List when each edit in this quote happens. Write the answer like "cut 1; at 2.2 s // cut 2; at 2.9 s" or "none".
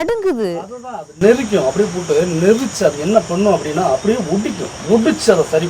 cut 1; at 4.7 s